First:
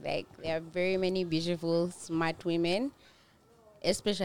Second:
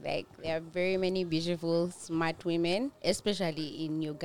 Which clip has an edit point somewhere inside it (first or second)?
second